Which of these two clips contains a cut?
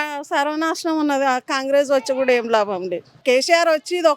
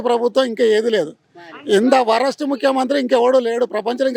first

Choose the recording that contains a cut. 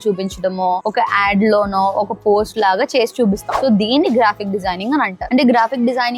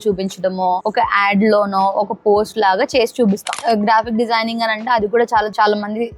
second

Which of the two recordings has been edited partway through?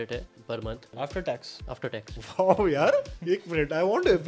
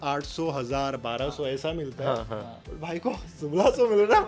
first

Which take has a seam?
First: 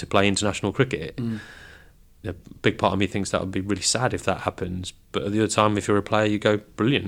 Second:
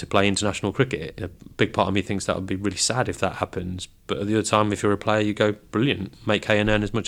second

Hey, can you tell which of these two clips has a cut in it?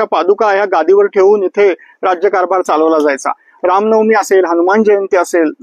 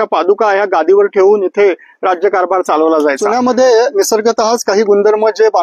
second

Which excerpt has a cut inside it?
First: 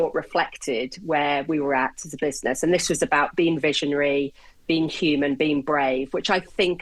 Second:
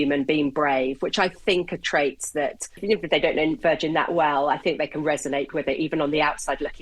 second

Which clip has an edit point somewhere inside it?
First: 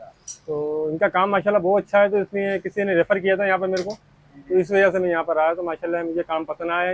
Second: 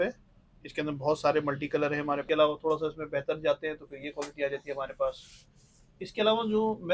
second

